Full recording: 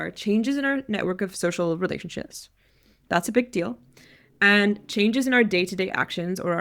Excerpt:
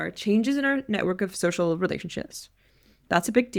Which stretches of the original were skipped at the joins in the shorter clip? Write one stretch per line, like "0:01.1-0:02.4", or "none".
none